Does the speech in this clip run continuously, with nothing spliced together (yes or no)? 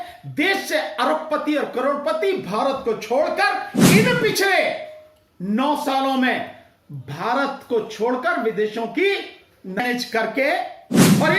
no